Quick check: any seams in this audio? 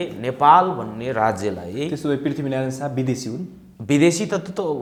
no; 0 cuts

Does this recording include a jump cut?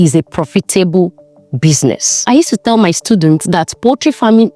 yes; 1 cut; at 2.2 s

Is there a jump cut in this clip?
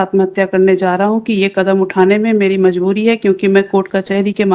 no; 0 cuts

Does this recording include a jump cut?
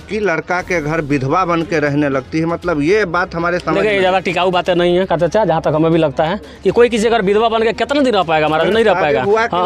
no; 0 cuts

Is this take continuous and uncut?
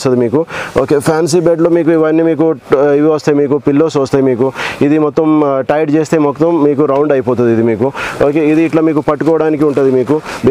yes; 0 cuts

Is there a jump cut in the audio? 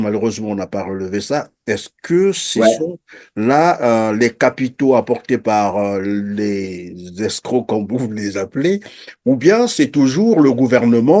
no; 0 cuts

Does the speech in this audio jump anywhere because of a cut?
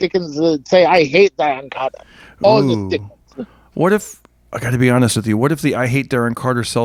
no; 0 cuts

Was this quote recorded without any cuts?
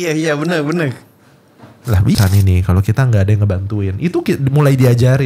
no; 1 cut; at 2.1 s

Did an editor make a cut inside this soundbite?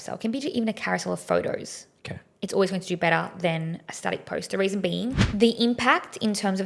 yes; 1 cut; at 5.2 s

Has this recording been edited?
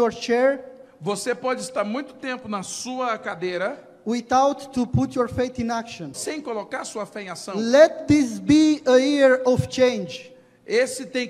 yes; 1 cut; at 6.2 s

